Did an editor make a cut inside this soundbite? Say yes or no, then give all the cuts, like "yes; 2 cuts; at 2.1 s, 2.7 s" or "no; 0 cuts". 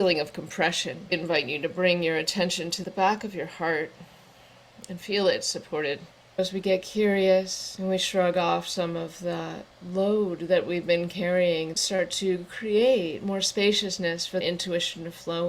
yes; 6 cuts; at 1.1 s, 2.8 s, 6.1 s, 7.6 s, 11.8 s, 14.4 s